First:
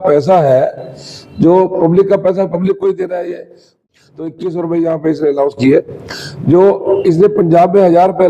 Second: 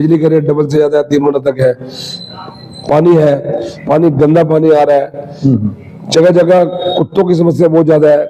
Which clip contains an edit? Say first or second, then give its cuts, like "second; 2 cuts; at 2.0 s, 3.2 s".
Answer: first; 1 cut; at 3.7 s